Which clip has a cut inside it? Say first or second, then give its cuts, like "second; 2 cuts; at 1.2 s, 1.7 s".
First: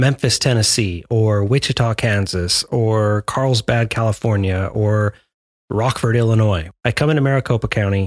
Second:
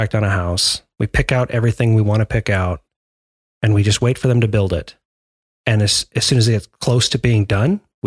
first; 1 cut; at 6.6 s